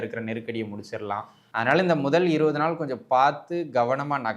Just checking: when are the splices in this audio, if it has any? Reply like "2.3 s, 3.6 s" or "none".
1.4 s